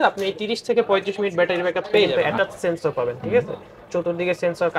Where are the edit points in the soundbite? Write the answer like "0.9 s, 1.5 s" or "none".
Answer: 2.1 s